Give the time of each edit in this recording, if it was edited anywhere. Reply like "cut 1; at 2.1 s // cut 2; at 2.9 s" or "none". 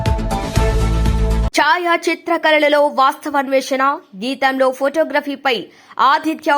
cut 1; at 1.5 s